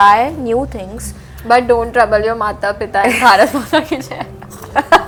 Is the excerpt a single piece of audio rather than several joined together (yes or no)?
yes